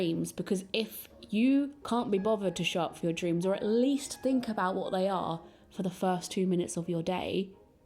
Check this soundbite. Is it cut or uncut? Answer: uncut